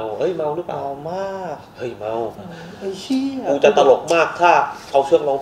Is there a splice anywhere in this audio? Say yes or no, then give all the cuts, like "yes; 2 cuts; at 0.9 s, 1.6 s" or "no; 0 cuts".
yes; 1 cut; at 2.4 s